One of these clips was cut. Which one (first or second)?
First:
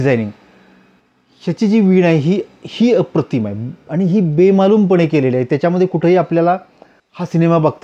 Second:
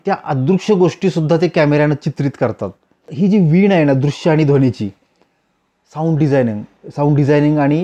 second